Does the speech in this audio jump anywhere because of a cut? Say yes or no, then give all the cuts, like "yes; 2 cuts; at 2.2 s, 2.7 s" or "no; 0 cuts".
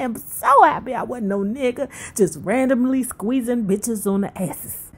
no; 0 cuts